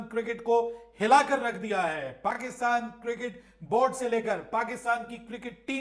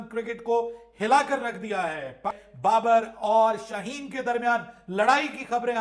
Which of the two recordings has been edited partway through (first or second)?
second